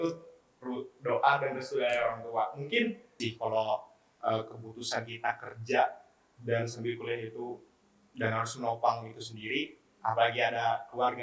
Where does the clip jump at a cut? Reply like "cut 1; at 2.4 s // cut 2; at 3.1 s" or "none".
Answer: cut 1; at 3.2 s